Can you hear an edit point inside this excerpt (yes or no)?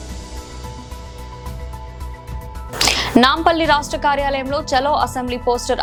no